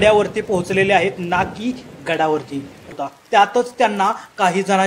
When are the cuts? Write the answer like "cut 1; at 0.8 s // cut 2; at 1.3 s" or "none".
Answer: cut 1; at 2.9 s